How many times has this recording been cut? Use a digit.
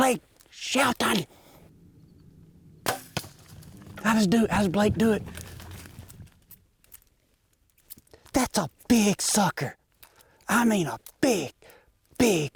0